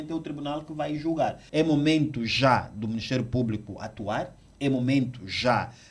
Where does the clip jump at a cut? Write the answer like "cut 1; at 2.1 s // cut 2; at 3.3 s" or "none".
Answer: cut 1; at 1.4 s